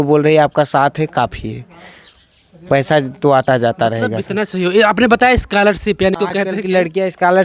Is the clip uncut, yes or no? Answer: yes